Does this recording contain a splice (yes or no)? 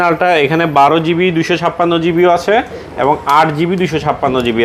no